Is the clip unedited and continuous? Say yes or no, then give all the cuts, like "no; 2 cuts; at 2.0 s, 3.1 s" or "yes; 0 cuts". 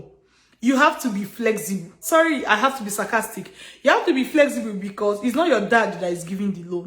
no; 1 cut; at 2.0 s